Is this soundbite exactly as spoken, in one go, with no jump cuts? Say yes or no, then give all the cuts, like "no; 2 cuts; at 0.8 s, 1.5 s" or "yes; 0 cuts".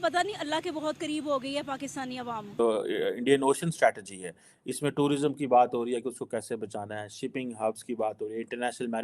no; 1 cut; at 2.6 s